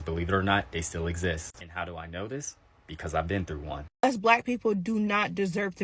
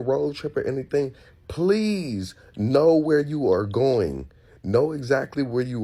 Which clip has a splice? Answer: first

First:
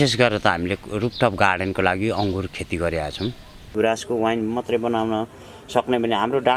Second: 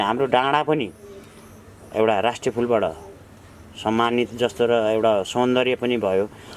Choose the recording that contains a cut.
first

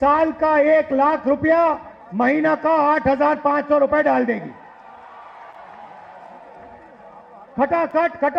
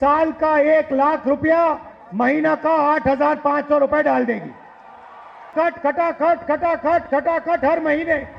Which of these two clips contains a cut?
second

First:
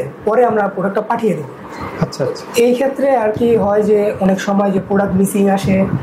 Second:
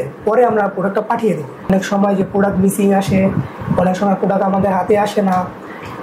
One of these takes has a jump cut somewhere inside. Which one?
second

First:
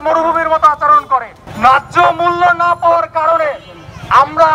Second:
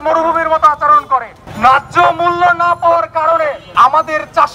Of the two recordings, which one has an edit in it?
second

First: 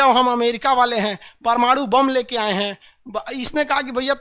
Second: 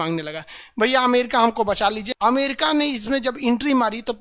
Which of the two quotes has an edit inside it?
second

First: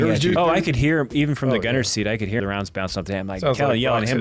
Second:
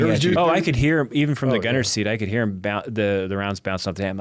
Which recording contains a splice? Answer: first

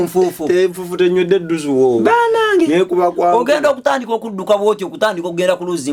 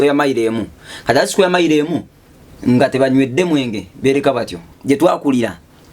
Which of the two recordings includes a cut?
second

